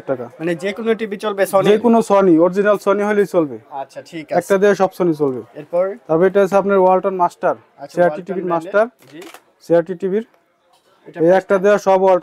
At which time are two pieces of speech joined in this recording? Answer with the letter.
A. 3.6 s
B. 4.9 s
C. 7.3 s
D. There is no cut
D